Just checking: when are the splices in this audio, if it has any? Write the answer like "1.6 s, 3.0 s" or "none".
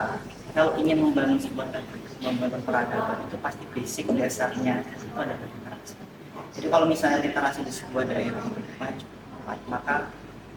none